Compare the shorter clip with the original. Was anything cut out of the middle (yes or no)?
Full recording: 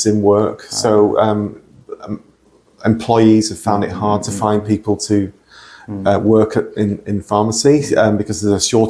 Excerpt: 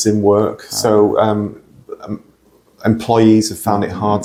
no